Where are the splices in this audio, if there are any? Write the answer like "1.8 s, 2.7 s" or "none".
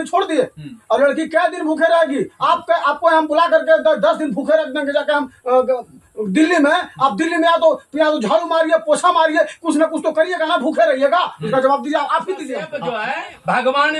12.7 s